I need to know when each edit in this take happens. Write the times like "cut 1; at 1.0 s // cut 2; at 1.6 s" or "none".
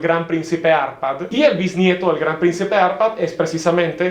cut 1; at 1.2 s